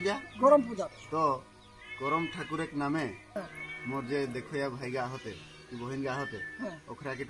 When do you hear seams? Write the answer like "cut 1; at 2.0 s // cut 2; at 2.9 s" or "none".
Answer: cut 1; at 3.2 s